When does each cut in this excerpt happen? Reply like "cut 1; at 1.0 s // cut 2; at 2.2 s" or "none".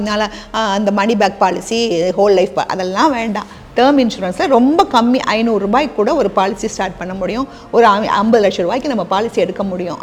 none